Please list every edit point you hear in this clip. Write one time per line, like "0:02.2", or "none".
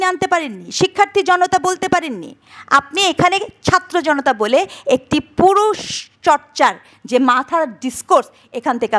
none